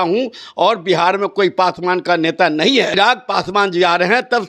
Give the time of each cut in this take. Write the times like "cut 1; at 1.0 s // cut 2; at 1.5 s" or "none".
cut 1; at 2.9 s